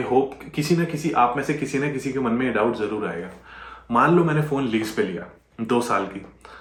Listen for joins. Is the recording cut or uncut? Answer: uncut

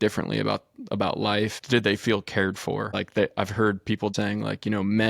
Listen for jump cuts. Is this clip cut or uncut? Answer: cut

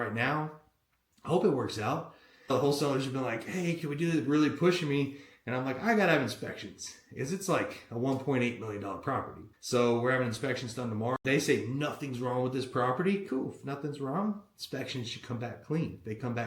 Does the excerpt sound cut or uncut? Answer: cut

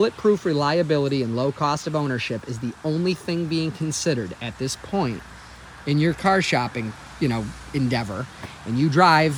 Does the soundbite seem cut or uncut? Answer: uncut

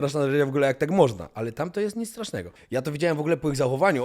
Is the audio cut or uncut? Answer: cut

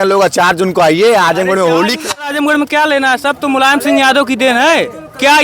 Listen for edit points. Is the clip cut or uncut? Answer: cut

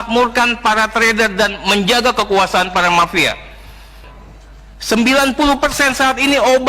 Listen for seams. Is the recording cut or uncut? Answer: cut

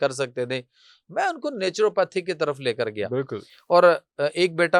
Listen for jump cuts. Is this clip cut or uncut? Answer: uncut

